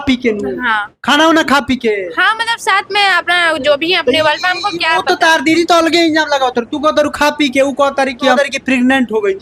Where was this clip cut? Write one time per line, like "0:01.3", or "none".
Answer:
0:08.3

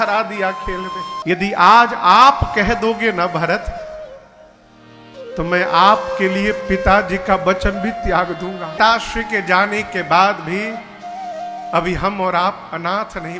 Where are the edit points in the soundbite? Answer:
0:01.2
0:08.8

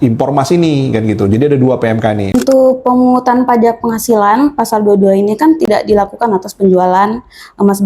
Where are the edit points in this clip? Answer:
0:02.2

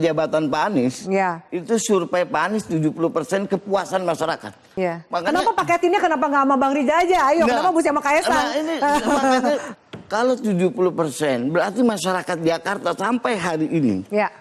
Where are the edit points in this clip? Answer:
0:04.6
0:09.8

